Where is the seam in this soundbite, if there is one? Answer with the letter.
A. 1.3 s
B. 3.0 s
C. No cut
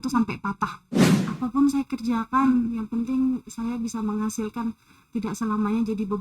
A